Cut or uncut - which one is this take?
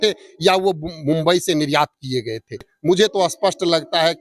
cut